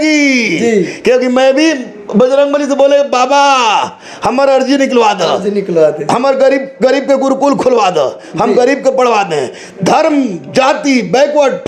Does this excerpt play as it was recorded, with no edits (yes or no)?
yes